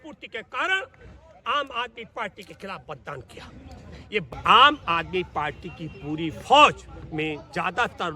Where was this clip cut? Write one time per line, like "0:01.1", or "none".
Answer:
0:04.3